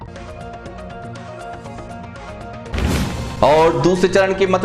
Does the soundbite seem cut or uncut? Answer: cut